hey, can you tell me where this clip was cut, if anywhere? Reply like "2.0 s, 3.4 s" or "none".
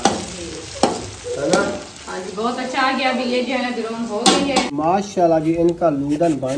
4.9 s